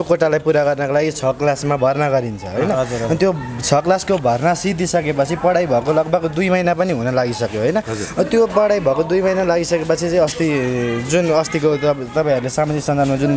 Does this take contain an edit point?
no; 0 cuts

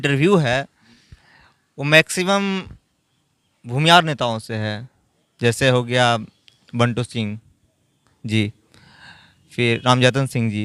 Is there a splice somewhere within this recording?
no; 0 cuts

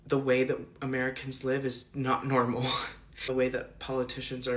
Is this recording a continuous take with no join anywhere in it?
yes; 0 cuts

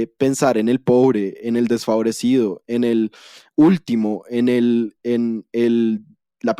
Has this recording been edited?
no; 0 cuts

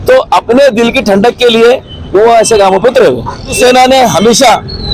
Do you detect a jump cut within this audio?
yes; 1 cut; at 3.5 s

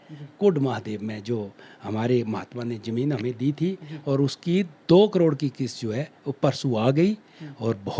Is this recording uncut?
yes; 0 cuts

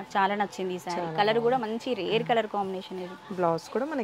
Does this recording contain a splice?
no; 0 cuts

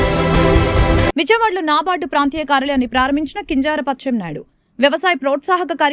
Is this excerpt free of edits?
yes; 0 cuts

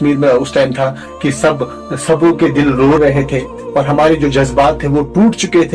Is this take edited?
no; 0 cuts

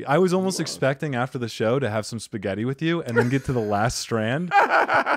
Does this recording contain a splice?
no; 0 cuts

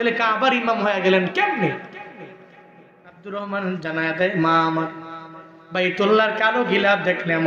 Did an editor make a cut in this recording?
yes; 1 cut; at 3.2 s

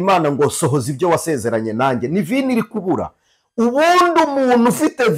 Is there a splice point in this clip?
no; 0 cuts

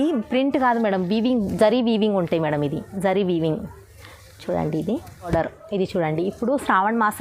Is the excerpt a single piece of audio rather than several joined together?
no; 1 cut; at 5.3 s

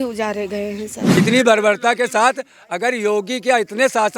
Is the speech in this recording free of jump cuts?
no; 1 cut; at 1.2 s

